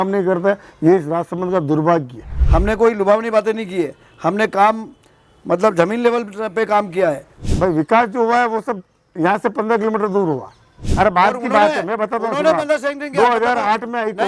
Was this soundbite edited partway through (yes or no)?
yes